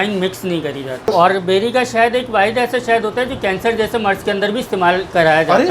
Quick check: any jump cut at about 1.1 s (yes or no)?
yes